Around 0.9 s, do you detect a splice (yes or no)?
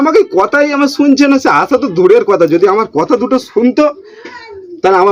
no